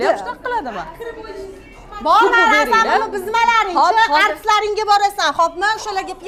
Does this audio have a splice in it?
no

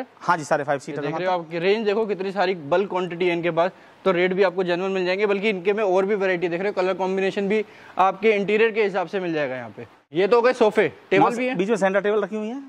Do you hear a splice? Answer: no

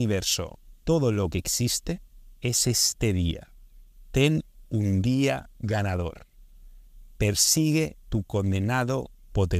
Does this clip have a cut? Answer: no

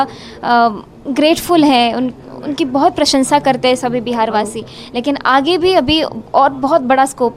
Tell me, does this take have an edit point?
no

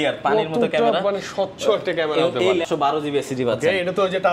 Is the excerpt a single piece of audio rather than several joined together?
no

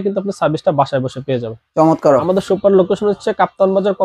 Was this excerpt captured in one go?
no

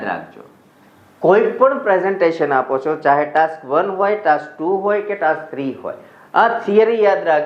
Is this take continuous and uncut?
yes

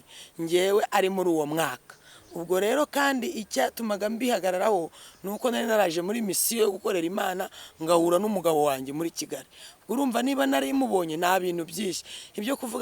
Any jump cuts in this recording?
no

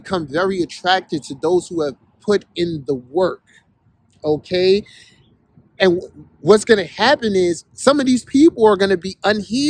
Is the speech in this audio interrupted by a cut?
no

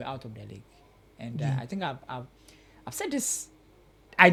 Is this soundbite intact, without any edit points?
yes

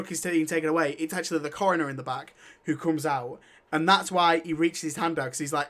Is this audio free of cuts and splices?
yes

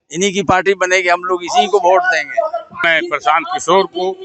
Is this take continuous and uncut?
no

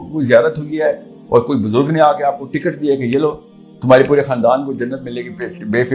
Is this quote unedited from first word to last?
yes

